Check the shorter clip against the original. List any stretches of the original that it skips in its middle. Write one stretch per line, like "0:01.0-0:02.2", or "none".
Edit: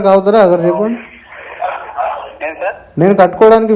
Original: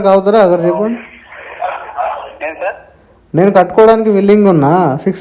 0:02.8-0:03.2